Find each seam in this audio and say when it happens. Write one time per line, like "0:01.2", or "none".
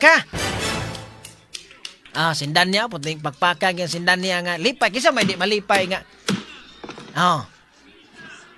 none